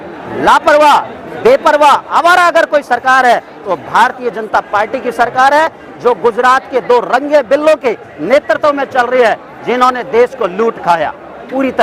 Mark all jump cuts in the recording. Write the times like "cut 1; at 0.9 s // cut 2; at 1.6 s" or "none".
none